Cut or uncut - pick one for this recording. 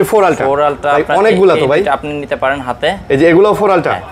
uncut